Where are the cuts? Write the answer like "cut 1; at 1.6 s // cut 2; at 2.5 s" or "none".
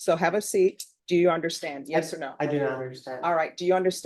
cut 1; at 0.9 s